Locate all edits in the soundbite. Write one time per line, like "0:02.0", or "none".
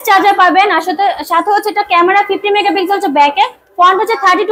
none